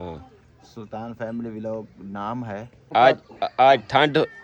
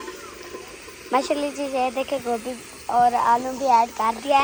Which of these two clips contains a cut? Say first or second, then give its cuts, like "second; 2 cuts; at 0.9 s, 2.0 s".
first; 1 cut; at 2.9 s